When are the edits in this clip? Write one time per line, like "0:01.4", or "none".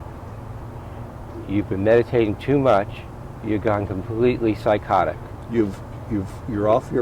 none